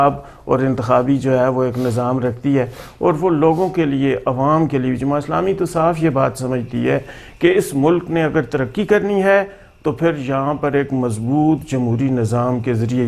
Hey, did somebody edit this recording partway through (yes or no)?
no